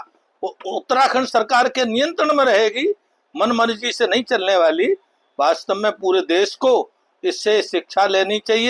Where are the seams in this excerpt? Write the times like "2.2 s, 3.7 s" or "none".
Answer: none